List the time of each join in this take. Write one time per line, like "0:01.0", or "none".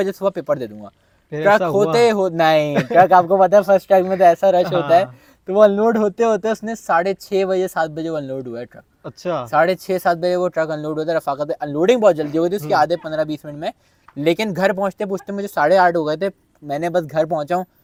none